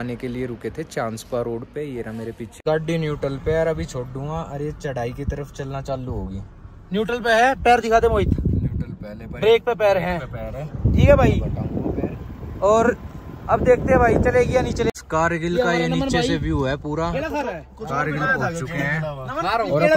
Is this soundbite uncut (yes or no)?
no